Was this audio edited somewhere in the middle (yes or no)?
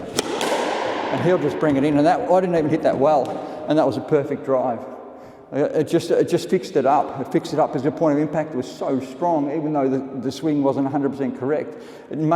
no